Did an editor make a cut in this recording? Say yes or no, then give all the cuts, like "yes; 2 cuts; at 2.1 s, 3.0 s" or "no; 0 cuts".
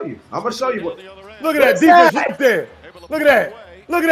no; 0 cuts